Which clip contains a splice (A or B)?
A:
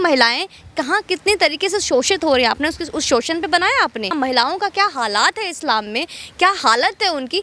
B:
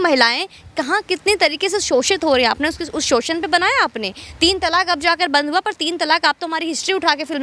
A